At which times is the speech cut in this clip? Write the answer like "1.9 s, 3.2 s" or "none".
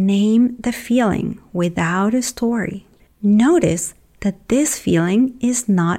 2.9 s